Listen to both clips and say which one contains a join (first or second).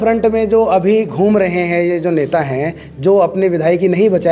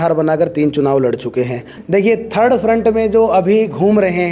second